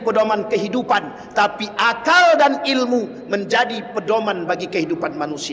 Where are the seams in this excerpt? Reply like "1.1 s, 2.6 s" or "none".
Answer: none